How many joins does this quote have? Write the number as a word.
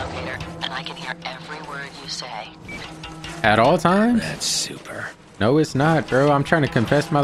zero